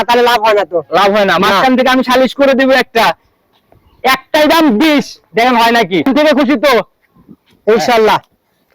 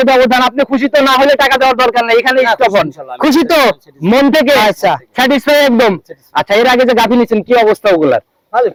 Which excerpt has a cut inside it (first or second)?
first